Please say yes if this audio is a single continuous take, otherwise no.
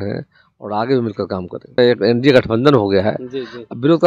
no